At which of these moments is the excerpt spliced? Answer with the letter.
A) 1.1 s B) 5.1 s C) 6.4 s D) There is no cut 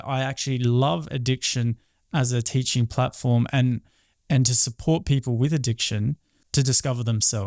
C